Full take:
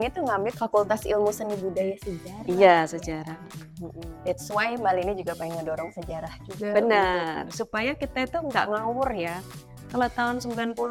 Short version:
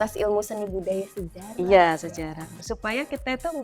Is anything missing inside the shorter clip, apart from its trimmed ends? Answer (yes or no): yes